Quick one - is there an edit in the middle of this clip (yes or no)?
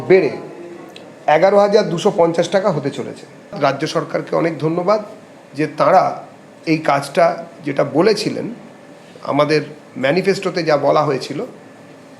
yes